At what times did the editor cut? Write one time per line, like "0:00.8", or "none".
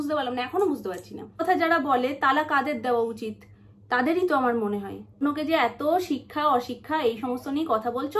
0:01.4
0:05.2